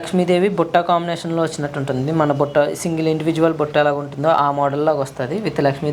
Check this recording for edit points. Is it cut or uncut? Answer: uncut